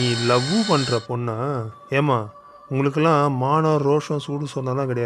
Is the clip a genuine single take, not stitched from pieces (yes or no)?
yes